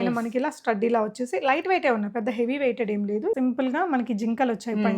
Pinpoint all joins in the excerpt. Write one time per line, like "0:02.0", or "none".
0:03.3